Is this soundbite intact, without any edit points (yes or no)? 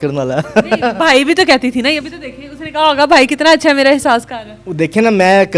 yes